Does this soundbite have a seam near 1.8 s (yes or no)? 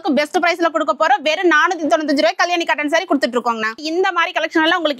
no